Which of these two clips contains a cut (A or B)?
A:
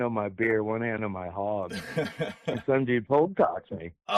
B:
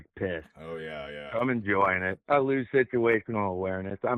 A